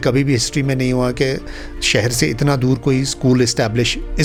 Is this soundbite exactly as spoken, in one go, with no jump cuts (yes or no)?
yes